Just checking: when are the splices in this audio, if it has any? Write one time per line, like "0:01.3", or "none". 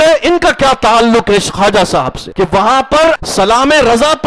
0:02.2
0:03.2